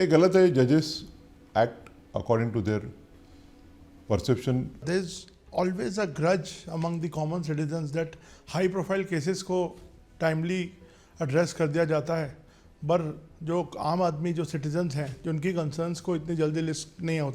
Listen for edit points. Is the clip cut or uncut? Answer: cut